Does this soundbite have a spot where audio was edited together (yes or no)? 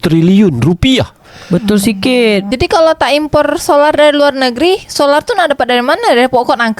no